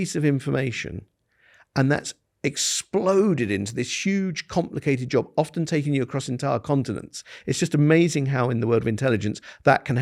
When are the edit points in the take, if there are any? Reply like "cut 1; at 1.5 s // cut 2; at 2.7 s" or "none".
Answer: none

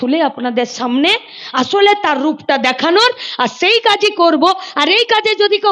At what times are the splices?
none

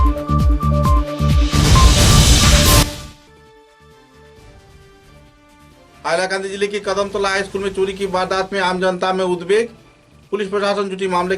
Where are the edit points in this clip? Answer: cut 1; at 2.9 s

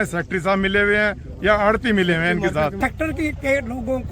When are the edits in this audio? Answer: cut 1; at 2.8 s

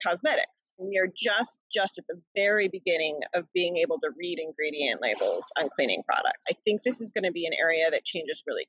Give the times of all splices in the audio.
cut 1; at 0.9 s // cut 2; at 6.5 s

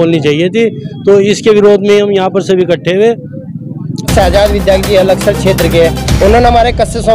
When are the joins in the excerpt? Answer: cut 1; at 4.1 s

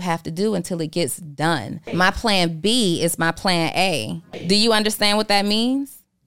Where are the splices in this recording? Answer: cut 1; at 1.8 s // cut 2; at 4.3 s

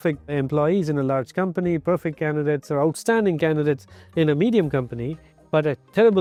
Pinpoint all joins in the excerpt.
none

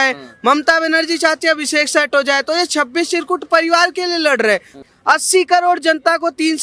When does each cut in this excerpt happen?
cut 1; at 4.8 s

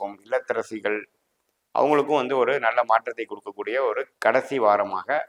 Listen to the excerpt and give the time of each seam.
none

